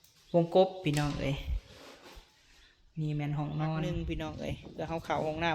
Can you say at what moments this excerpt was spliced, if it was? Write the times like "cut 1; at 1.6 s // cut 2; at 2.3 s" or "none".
cut 1; at 4.0 s